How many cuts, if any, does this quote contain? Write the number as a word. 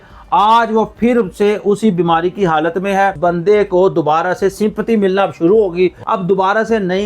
two